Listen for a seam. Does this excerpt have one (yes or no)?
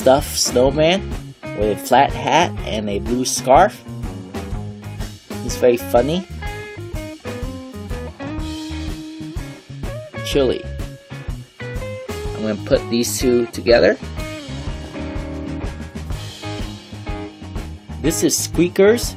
no